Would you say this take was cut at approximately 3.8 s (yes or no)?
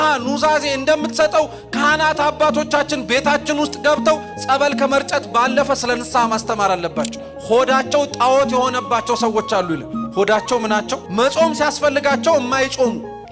no